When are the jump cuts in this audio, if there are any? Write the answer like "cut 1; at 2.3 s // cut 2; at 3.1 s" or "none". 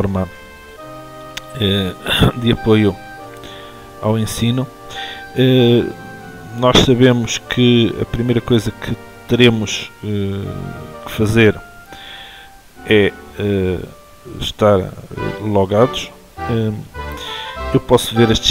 none